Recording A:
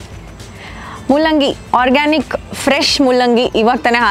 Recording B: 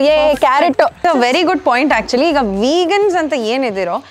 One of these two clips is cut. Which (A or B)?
B